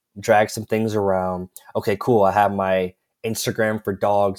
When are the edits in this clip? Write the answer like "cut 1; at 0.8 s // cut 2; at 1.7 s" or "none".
none